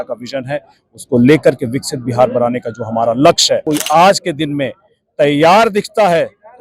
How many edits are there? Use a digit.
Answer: 1